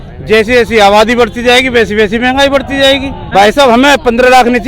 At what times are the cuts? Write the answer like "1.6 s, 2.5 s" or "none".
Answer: 3.2 s

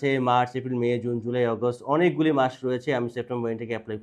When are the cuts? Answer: none

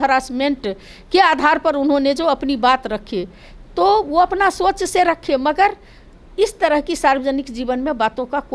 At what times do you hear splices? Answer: none

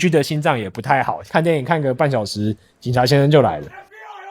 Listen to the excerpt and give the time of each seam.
1.2 s

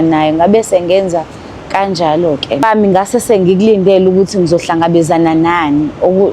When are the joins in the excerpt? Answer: 2.6 s

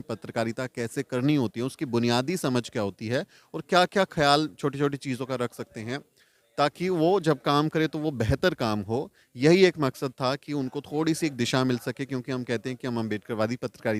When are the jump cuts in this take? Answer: none

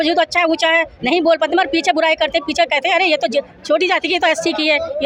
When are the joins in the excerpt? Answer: none

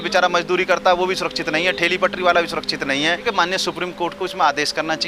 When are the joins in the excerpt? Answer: 3.2 s

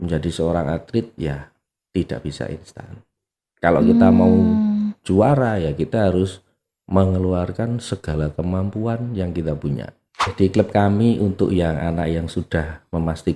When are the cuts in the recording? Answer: 10.3 s

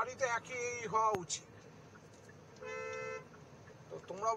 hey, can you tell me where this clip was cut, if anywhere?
none

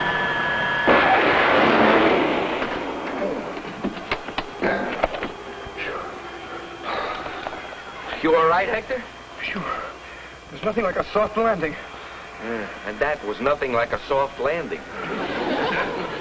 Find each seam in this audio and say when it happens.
none

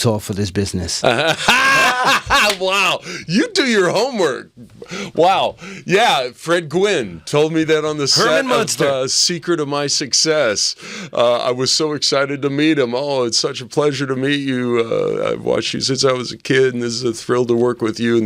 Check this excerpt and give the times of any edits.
none

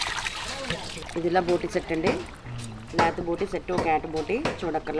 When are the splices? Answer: 1.0 s

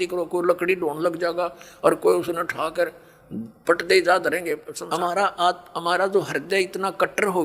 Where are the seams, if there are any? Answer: 4.7 s

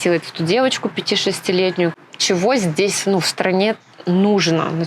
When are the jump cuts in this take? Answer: 1.9 s

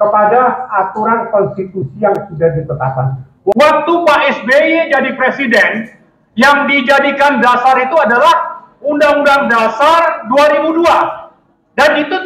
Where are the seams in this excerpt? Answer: 3.5 s

